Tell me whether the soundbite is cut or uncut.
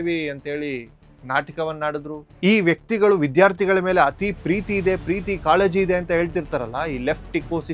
cut